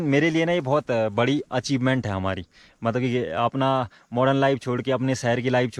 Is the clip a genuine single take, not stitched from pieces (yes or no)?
yes